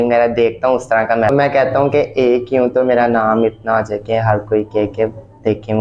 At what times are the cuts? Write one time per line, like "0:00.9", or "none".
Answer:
0:01.3